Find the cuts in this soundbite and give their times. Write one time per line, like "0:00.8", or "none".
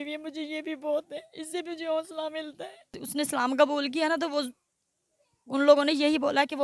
0:03.0